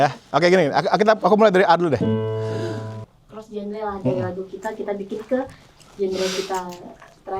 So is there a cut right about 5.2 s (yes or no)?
no